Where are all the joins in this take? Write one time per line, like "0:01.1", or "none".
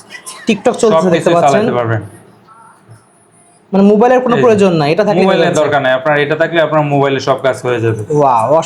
none

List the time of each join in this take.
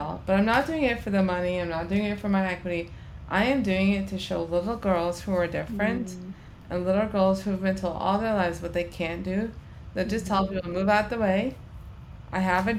none

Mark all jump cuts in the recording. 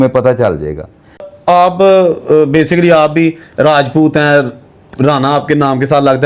0:01.3

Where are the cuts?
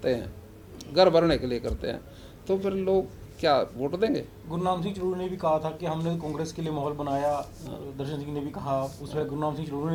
none

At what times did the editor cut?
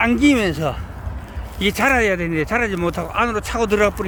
none

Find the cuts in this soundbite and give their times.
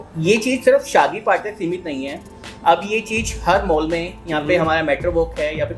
none

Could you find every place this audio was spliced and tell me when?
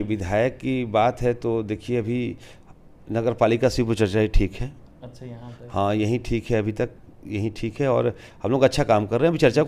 none

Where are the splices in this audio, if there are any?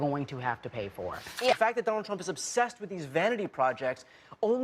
0:01.5

